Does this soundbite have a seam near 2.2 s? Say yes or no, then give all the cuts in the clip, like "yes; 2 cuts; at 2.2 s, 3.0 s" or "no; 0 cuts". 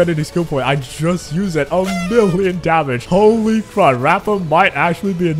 no; 0 cuts